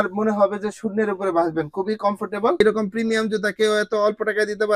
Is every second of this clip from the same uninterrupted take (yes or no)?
no